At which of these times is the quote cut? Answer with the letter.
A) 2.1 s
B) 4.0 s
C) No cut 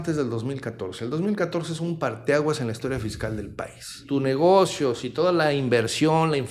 B